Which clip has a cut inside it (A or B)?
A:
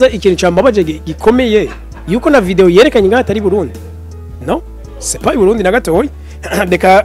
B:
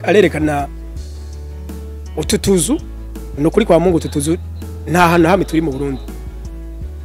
B